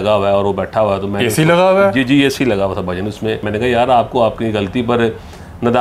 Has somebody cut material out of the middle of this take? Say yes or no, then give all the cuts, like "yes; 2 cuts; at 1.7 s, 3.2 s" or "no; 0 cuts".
yes; 1 cut; at 3.5 s